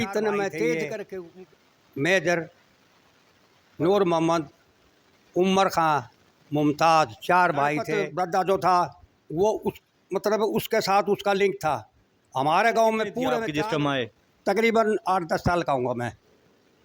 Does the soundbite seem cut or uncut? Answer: cut